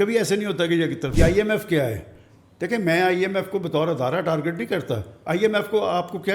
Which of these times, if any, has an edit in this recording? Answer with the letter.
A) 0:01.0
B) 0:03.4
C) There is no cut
A